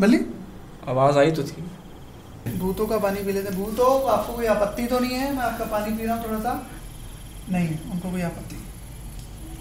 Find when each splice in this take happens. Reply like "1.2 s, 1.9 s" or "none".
2.5 s